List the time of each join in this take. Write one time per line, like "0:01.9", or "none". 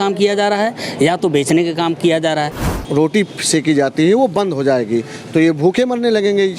0:02.6